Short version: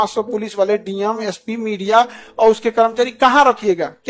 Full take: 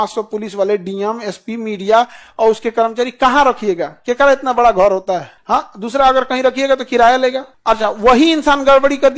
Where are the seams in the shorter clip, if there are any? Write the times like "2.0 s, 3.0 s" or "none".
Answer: none